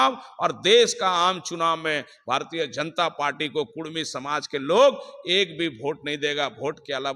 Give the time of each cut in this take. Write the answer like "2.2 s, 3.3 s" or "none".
none